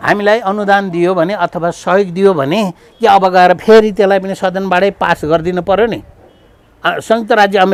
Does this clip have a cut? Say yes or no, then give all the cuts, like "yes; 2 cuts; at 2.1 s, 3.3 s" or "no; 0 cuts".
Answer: no; 0 cuts